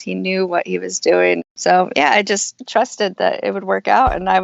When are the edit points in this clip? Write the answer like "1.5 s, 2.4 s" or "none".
1.4 s